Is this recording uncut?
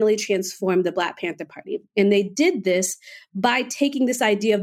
yes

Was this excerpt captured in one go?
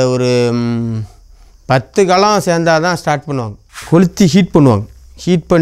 no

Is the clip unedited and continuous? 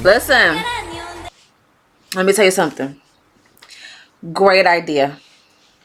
yes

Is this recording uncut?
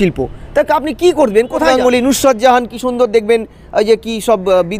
no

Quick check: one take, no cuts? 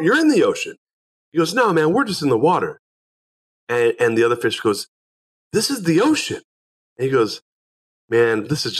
yes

